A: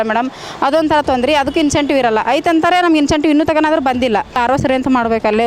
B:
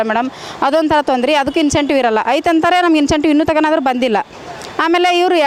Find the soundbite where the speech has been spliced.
A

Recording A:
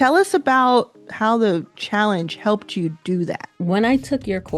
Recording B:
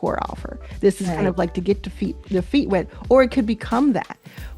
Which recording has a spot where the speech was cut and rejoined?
A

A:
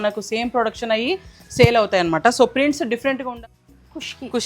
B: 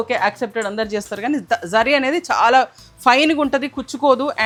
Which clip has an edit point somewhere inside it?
A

